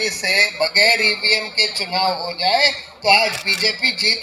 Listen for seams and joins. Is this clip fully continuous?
yes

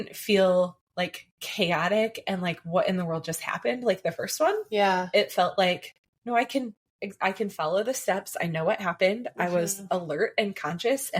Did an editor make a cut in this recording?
no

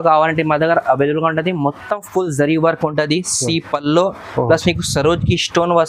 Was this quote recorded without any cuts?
yes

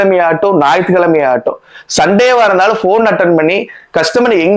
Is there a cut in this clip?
no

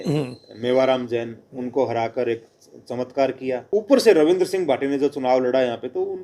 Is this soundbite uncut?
no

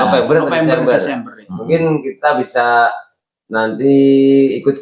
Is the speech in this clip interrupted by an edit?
no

